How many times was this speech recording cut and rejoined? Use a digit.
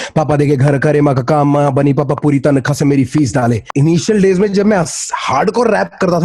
1